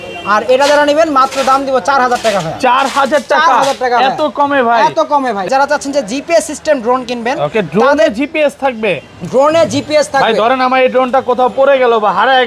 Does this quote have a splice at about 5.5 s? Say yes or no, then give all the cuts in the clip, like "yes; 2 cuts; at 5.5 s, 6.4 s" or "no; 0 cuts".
yes; 1 cut; at 5.5 s